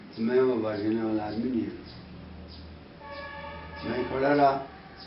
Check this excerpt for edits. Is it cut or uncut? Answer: uncut